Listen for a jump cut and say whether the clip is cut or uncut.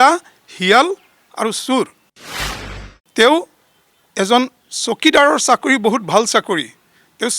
cut